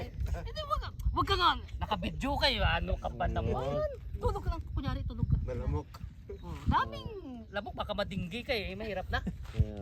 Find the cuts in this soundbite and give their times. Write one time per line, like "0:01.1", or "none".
none